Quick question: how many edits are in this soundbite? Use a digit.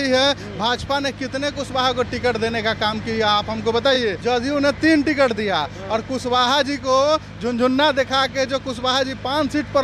1